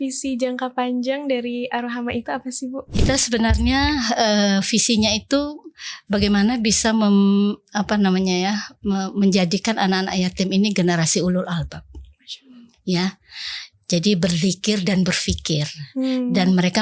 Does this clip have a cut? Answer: yes; 1 cut; at 3.0 s

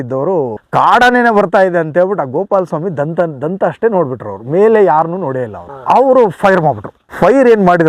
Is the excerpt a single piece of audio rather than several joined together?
yes; 0 cuts

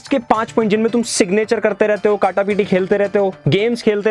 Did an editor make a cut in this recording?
no; 0 cuts

